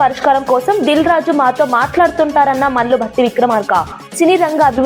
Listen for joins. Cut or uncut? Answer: uncut